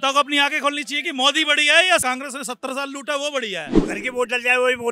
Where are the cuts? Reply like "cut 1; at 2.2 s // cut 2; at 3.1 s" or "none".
cut 1; at 3.7 s